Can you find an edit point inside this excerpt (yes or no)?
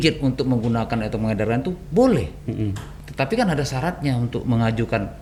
no